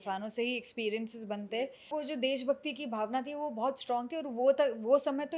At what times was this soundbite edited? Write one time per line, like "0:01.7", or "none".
0:01.9